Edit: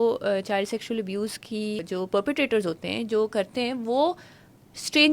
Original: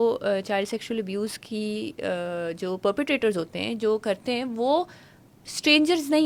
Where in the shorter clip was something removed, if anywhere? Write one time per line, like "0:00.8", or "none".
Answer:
0:01.8